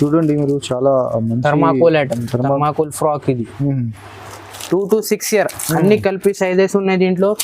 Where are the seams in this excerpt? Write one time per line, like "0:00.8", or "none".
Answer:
0:04.5

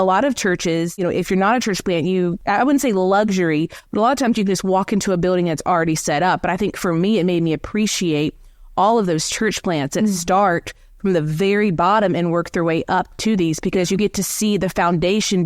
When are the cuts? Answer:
0:01.0
0:02.4

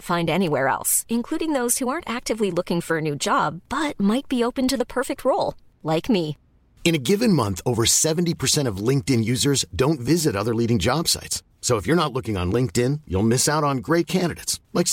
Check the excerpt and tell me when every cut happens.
none

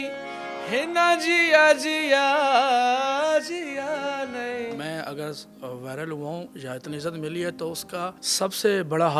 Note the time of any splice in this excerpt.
0:04.8
0:08.2

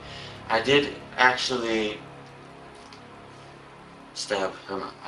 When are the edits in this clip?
none

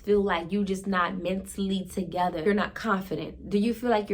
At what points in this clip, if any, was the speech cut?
0:02.4

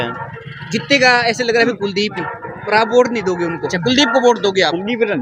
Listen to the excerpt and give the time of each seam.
0:03.7

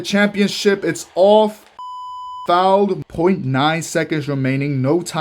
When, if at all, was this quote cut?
0:02.1
0:03.0

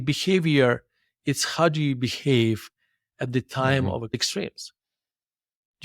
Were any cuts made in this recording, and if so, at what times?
0:04.1

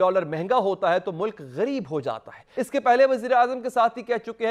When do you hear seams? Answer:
0:02.4

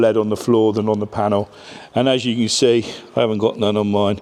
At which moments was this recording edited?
none

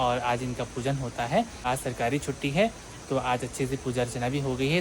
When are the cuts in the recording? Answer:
0:01.6

